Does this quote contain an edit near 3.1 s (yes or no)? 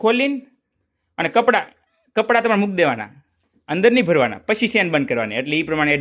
no